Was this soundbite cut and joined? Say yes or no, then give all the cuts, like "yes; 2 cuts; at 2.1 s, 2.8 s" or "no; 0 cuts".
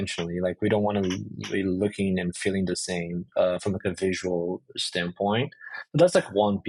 no; 0 cuts